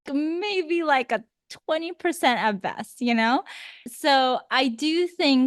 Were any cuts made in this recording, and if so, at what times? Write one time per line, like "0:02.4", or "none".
0:03.9